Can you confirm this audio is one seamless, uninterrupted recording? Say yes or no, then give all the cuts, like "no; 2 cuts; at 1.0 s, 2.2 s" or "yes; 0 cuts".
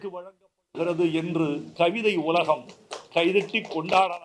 no; 1 cut; at 1.7 s